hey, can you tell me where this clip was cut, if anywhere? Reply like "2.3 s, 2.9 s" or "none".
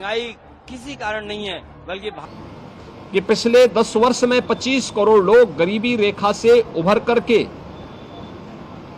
2.2 s

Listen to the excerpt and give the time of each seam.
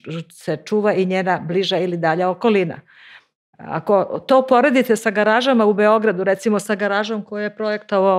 none

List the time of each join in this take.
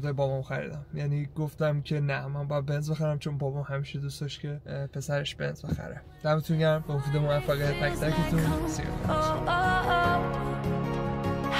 none

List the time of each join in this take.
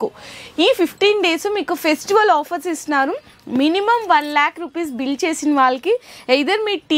none

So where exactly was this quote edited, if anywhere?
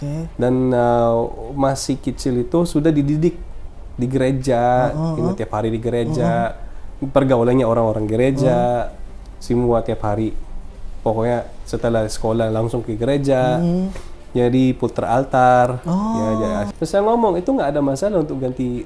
16.7 s

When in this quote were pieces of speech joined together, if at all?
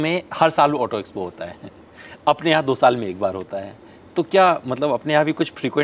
none

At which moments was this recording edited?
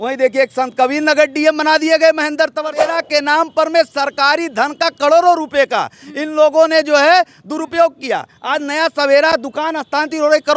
2.8 s

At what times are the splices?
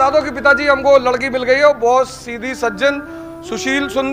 none

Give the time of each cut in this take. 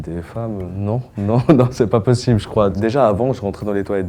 2.8 s

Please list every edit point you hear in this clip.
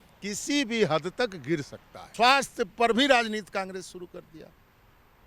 2.1 s

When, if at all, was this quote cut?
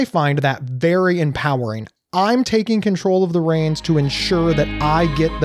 none

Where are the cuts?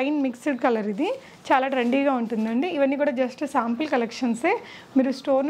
none

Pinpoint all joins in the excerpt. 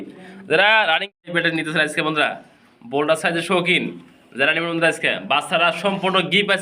1.2 s

